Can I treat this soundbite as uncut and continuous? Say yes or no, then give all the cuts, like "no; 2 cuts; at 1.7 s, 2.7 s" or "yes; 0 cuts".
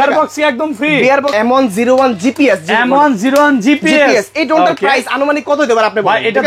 no; 1 cut; at 1.3 s